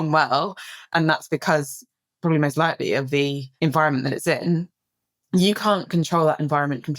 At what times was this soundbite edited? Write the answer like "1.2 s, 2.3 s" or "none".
0.8 s, 3.4 s